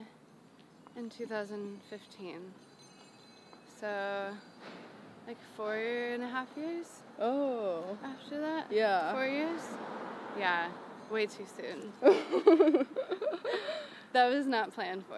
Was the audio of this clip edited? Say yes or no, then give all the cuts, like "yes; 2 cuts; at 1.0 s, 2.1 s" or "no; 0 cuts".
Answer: no; 0 cuts